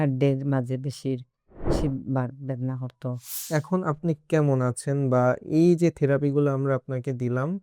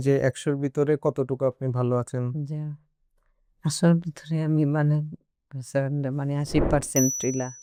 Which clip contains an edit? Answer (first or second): first